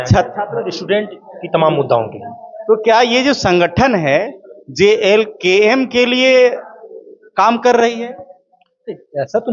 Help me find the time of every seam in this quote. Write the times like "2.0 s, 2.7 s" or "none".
none